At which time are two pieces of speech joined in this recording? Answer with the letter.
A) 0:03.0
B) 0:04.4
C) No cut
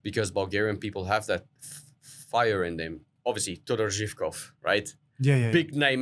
A